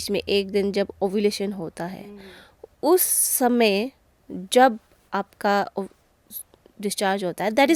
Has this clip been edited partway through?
no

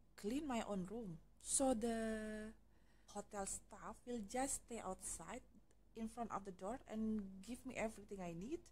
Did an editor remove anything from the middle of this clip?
yes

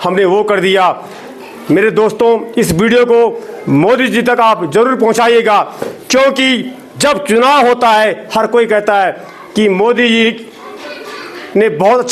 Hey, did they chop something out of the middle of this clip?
no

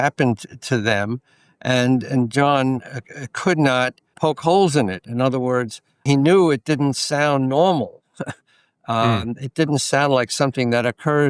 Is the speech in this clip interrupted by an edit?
yes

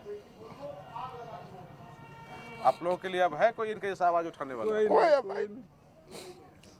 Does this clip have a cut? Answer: no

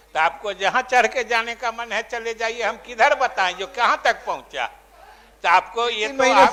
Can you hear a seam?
no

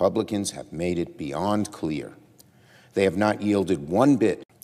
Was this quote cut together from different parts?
no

